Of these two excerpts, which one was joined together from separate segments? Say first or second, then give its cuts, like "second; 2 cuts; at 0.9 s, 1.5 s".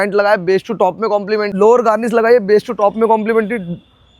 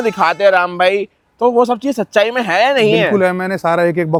first; 1 cut; at 1.5 s